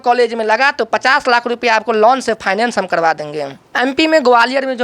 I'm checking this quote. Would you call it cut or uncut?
cut